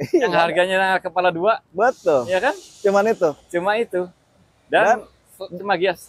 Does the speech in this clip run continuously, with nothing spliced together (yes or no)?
yes